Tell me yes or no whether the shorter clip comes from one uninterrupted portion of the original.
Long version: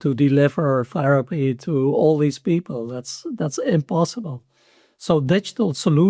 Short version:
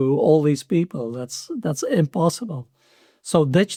yes